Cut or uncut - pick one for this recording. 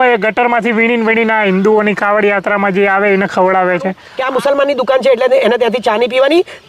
cut